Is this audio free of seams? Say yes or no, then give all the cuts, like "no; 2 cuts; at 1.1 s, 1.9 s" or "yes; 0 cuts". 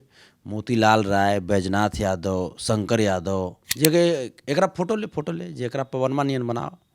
no; 1 cut; at 3.6 s